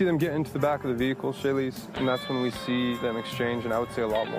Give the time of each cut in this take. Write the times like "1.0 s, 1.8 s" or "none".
3.0 s